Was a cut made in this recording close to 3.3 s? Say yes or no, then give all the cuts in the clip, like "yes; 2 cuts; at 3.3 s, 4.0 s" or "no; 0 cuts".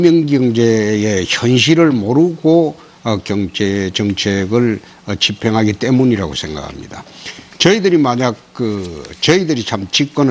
no; 0 cuts